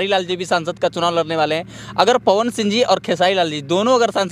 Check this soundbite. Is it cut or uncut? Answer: uncut